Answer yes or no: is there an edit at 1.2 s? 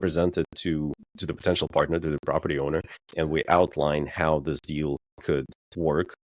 yes